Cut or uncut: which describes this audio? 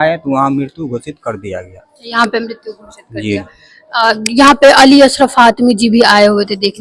uncut